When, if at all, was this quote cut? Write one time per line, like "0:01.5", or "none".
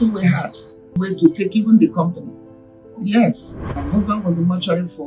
0:01.0
0:03.8